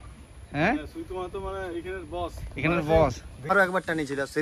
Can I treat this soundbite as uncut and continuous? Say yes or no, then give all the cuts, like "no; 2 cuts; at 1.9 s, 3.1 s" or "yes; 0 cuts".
no; 1 cut; at 3.5 s